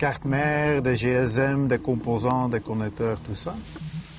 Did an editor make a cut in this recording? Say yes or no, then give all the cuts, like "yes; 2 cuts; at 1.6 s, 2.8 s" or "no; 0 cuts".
yes; 1 cut; at 3.2 s